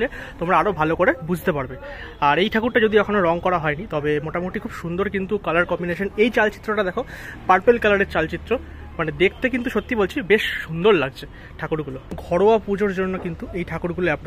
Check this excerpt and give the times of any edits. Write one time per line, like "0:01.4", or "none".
0:12.1